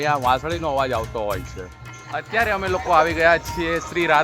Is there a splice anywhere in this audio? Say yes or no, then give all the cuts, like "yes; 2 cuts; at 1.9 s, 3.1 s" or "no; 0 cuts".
yes; 1 cut; at 2.0 s